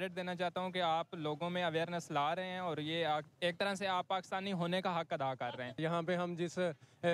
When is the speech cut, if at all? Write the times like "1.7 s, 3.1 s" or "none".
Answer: 5.8 s